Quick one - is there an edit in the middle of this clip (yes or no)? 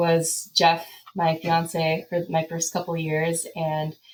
no